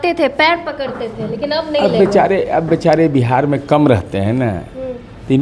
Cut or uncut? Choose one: uncut